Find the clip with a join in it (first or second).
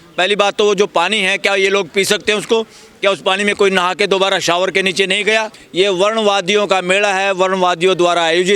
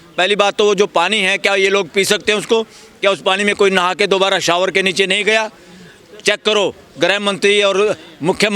first